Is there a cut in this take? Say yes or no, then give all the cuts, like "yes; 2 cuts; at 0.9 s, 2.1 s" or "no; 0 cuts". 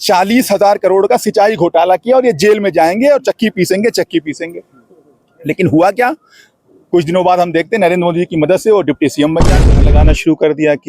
yes; 1 cut; at 9.8 s